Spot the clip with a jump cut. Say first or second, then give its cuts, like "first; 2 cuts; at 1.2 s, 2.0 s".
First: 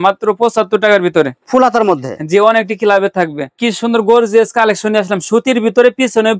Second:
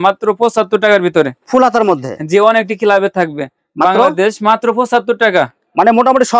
first; 1 cut; at 3.6 s